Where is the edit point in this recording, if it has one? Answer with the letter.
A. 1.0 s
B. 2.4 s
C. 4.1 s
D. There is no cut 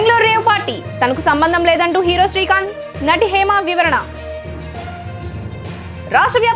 C